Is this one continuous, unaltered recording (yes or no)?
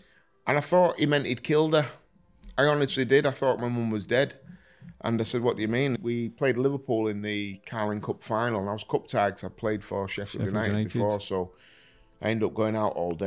no